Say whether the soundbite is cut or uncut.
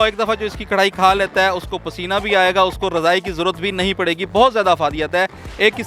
uncut